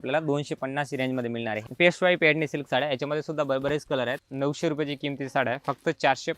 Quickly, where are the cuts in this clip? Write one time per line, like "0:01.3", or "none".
0:01.6
0:04.2